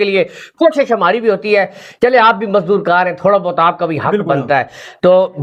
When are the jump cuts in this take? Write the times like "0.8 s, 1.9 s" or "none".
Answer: none